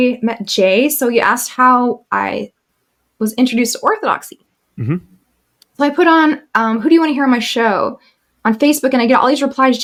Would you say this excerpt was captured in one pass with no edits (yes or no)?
yes